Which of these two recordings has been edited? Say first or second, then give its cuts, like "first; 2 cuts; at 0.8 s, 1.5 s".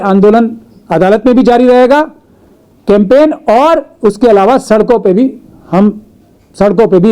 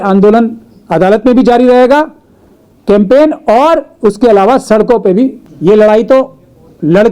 second; 1 cut; at 5.5 s